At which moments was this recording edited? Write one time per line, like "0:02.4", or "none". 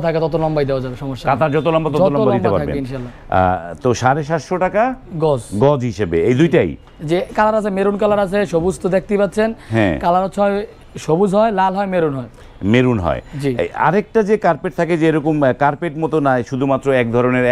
none